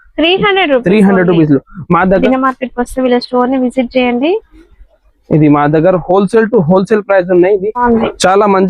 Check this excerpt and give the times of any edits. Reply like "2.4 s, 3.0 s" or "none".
2.2 s, 7.8 s

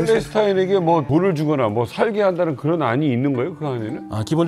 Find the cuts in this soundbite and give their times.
1.1 s

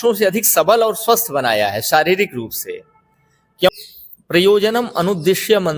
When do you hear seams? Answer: 3.7 s

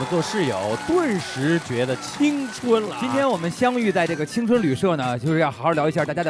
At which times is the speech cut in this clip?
3.0 s

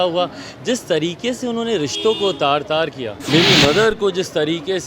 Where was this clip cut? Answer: 3.1 s

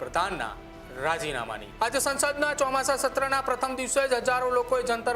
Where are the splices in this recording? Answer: 1.6 s

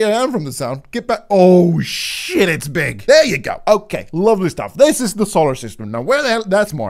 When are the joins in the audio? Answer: 2.9 s

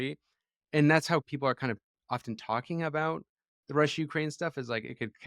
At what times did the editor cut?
1.2 s

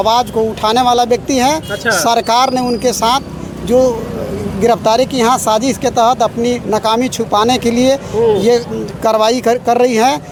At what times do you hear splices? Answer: none

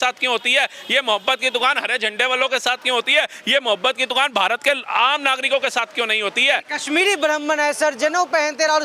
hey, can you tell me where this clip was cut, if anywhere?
none

